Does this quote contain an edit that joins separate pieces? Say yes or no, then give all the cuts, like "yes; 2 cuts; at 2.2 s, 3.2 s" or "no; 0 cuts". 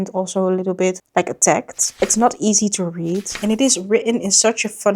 yes; 2 cuts; at 1.9 s, 3.3 s